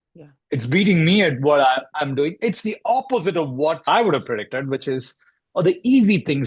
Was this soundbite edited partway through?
yes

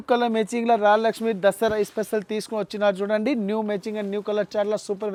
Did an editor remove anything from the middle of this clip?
no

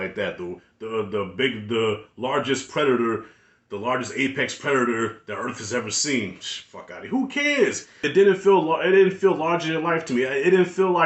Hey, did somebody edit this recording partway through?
yes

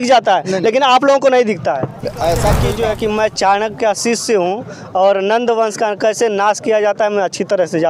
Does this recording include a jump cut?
yes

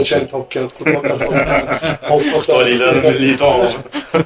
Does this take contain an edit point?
no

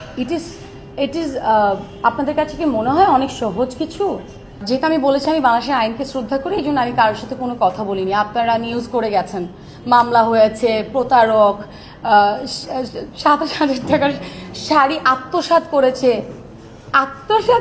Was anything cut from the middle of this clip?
yes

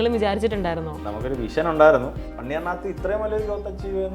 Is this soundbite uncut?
no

